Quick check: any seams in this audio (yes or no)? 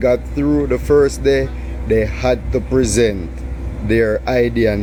no